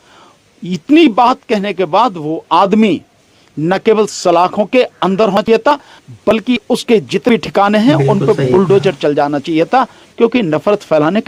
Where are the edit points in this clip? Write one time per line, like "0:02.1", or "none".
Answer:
none

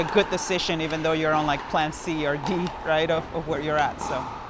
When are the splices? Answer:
none

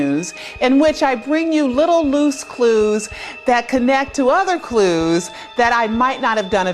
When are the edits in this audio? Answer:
0:03.6

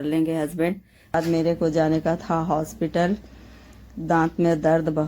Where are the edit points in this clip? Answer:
0:01.1

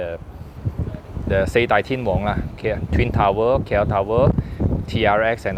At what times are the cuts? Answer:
none

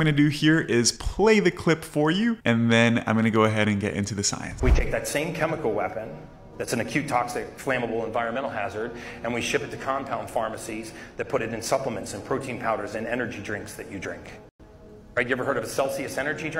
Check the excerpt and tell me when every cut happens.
0:00.7
0:02.4
0:04.5

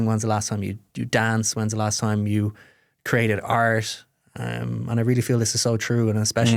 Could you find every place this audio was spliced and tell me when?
none

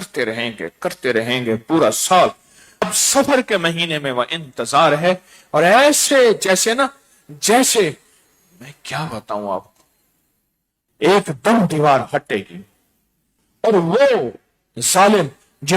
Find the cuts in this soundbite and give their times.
0:02.8

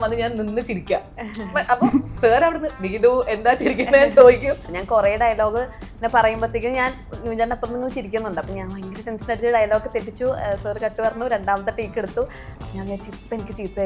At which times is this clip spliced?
0:04.7
0:12.6

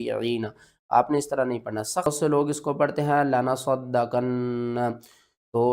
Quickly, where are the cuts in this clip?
0:02.1

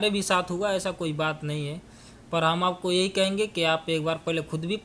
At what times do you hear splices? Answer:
none

